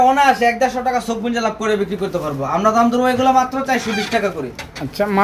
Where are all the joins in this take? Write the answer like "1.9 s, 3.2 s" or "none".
none